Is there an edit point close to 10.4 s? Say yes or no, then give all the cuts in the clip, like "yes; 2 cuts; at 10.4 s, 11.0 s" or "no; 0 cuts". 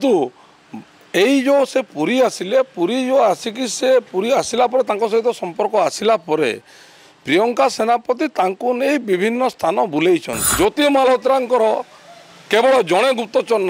yes; 1 cut; at 10.4 s